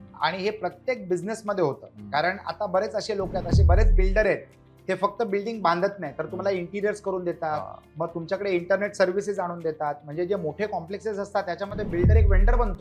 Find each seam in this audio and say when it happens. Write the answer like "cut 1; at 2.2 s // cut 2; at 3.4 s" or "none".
none

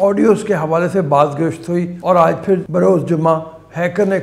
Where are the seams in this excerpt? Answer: cut 1; at 1.9 s // cut 2; at 2.7 s

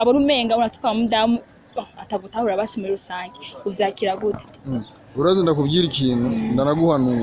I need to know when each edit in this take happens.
none

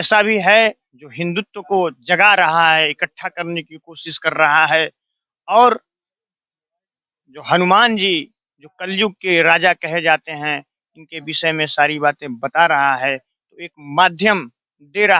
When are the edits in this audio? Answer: none

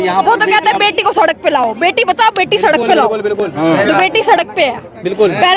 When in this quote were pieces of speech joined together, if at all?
none

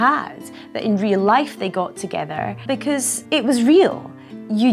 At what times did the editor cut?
cut 1; at 3.1 s

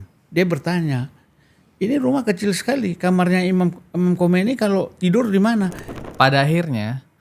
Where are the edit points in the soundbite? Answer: cut 1; at 5.9 s

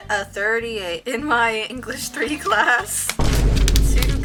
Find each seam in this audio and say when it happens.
none

